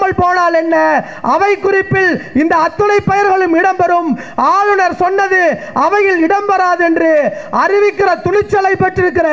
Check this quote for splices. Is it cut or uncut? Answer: uncut